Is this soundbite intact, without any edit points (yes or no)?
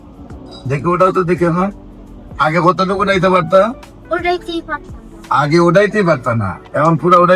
yes